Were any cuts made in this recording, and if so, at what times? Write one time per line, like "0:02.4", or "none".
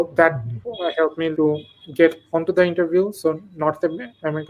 0:01.3